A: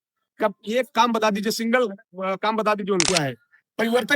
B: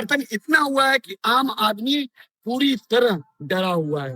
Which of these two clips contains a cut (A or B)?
A